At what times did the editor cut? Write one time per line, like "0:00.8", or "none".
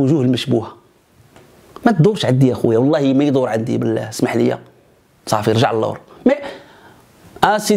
none